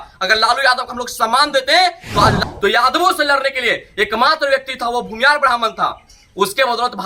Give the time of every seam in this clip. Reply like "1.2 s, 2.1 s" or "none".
2.4 s